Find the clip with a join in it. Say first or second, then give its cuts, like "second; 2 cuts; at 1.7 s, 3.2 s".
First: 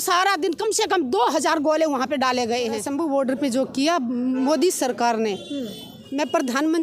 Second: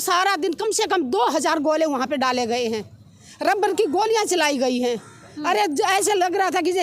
first; 1 cut; at 2.9 s